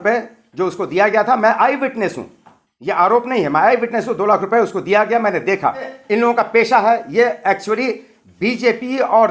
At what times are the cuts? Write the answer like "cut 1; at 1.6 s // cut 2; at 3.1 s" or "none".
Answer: cut 1; at 6.0 s